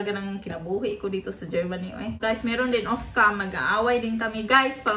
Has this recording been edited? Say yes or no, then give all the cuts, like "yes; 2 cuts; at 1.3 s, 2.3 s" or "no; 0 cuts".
yes; 1 cut; at 2.2 s